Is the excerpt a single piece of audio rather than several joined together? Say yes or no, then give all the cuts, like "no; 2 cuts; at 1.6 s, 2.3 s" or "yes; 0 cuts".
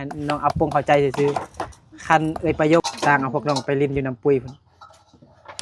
no; 1 cut; at 2.8 s